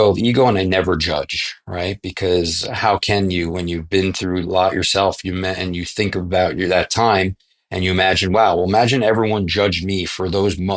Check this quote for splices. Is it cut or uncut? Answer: uncut